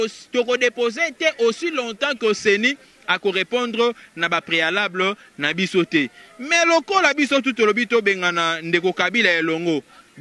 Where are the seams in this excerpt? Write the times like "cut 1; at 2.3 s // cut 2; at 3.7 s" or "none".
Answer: none